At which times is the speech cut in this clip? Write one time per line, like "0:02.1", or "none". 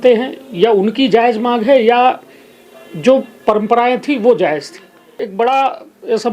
0:05.2